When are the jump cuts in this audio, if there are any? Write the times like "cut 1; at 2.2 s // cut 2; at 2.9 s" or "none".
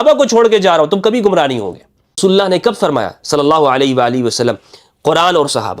cut 1; at 2.2 s